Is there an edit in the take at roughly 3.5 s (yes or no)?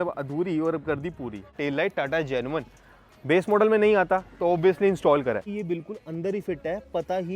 no